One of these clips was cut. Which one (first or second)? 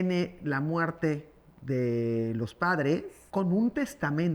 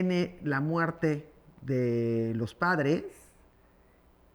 first